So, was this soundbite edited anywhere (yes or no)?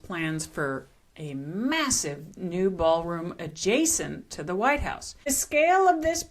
yes